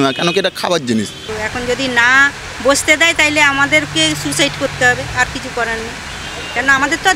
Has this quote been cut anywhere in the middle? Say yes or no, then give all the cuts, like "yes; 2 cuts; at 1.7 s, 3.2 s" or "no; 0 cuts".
yes; 1 cut; at 1.3 s